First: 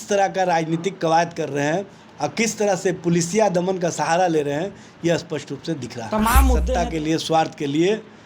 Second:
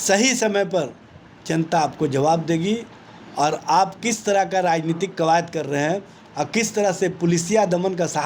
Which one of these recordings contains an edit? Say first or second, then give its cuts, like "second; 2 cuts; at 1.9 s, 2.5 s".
first; 1 cut; at 6.7 s